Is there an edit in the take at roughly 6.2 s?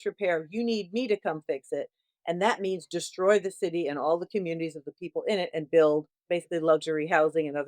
yes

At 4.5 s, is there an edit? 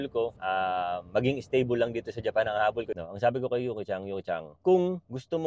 yes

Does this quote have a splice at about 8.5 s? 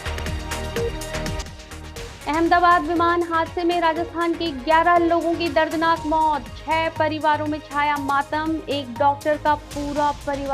no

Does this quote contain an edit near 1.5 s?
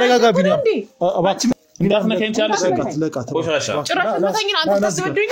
yes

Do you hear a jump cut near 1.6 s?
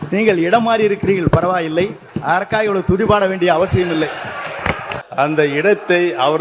no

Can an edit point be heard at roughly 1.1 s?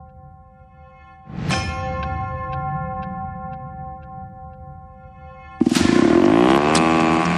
yes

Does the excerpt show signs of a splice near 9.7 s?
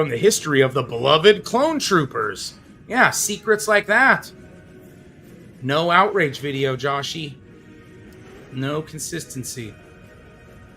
yes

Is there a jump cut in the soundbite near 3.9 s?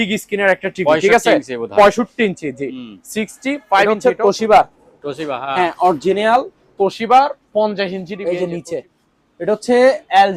yes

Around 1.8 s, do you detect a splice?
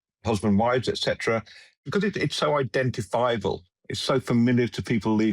yes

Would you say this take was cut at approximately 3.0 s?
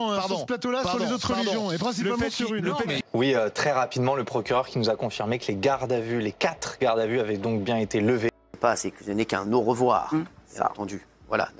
yes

